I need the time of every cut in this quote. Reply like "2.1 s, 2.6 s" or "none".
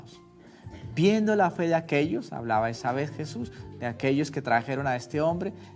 3.9 s